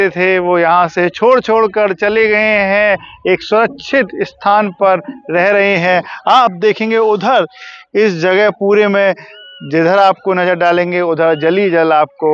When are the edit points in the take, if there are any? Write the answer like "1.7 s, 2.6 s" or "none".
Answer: none